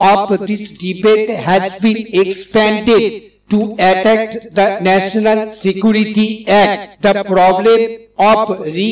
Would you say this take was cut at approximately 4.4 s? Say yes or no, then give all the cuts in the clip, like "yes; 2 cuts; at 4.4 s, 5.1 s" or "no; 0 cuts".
no; 1 cut; at 6.9 s